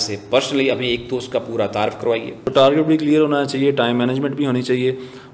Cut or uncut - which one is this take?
cut